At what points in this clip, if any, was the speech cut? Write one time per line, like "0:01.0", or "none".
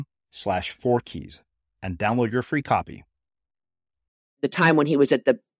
0:04.4